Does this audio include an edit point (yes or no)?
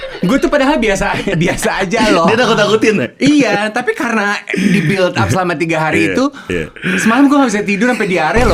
no